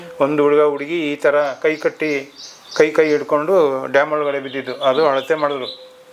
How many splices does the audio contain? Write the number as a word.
zero